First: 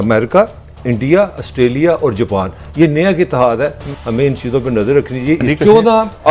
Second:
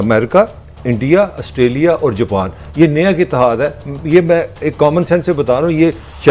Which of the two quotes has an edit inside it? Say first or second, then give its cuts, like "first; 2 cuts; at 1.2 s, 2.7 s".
first; 2 cuts; at 3.9 s, 5.5 s